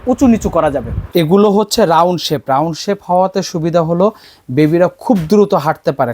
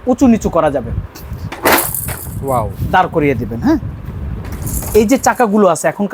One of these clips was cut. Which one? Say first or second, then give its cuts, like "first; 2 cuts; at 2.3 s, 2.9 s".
first; 1 cut; at 0.9 s